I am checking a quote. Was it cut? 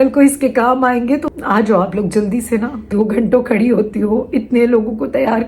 yes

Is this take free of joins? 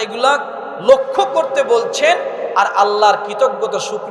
yes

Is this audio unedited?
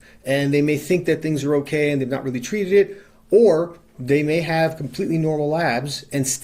yes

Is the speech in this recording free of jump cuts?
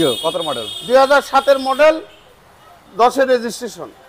yes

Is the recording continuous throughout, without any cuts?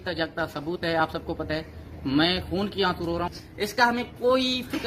no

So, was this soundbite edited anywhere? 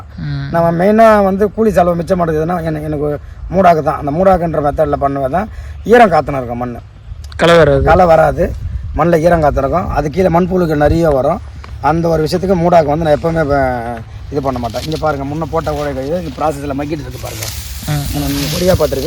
no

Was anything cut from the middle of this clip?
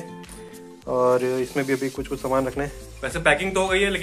yes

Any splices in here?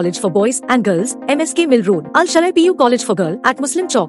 no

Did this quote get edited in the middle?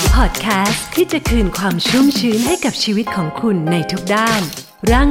no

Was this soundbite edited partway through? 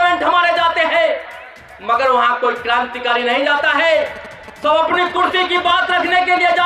no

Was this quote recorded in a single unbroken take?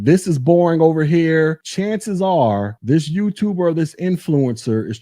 no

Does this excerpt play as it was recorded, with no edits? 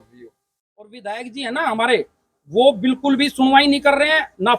no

